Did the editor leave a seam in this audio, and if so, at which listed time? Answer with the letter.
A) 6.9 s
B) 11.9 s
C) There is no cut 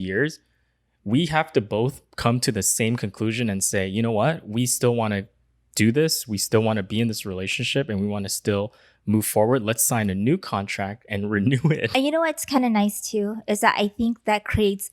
B